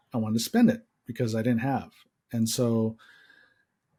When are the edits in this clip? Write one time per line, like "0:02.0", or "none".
none